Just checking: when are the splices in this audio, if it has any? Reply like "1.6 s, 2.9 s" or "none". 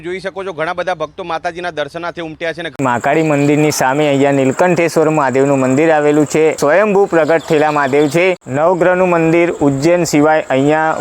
2.7 s, 6.6 s, 8.4 s